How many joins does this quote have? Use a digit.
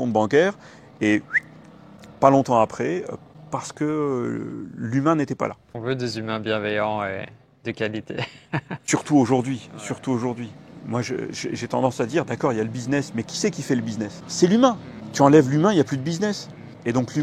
0